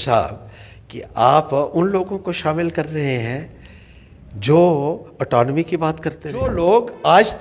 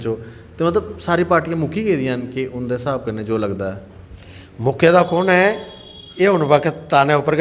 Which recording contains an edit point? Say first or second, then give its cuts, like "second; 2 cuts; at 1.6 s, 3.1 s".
first; 1 cut; at 6.5 s